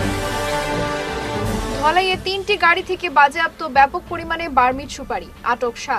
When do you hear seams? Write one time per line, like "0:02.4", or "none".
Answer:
0:01.6